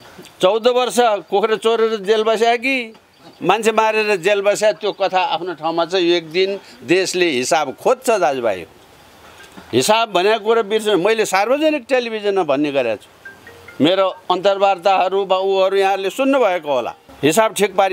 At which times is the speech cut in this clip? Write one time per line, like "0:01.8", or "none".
0:17.0